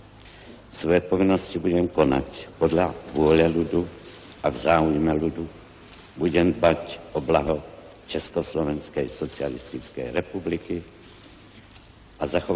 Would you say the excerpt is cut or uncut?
cut